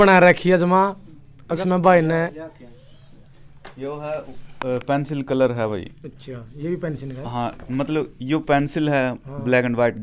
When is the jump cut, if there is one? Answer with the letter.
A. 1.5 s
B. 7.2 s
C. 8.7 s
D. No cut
A